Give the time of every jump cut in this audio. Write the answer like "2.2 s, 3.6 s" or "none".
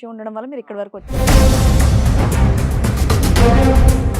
1.1 s

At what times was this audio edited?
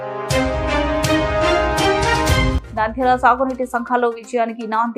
2.6 s

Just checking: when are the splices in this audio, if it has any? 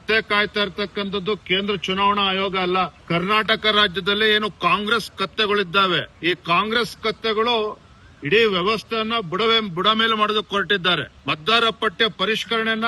3.0 s, 6.1 s, 11.1 s

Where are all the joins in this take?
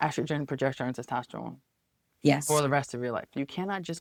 none

